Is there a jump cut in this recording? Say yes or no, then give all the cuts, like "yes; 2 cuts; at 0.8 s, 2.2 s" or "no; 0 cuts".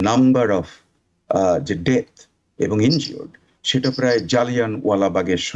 no; 0 cuts